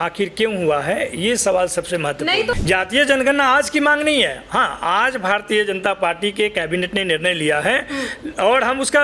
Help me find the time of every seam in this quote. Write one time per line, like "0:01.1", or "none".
0:02.6